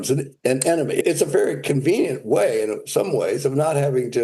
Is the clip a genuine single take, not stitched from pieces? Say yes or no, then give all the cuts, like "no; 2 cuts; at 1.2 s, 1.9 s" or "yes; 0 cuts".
no; 1 cut; at 1.0 s